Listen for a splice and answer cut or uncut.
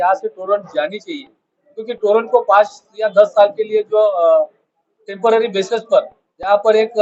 uncut